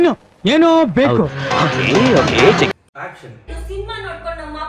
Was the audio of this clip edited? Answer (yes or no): no